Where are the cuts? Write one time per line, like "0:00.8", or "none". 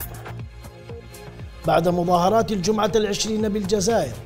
none